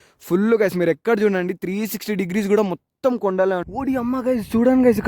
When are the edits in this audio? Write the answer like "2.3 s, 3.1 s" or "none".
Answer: 3.7 s